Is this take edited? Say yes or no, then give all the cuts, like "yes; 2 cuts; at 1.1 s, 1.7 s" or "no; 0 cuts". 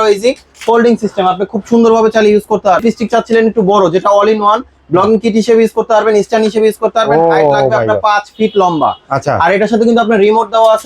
yes; 1 cut; at 2.8 s